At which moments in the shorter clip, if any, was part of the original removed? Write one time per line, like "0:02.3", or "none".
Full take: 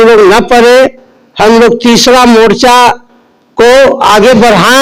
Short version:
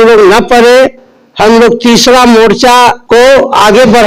0:03.0